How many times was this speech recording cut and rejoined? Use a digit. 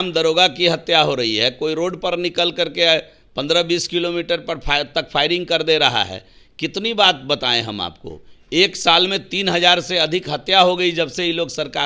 0